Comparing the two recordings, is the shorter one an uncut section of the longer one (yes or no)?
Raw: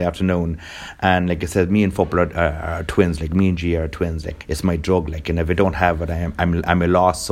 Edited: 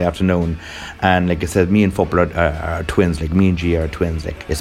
yes